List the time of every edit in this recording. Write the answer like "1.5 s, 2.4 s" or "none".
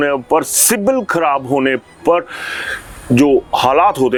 none